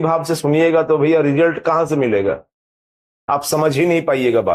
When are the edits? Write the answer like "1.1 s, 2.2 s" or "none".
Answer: none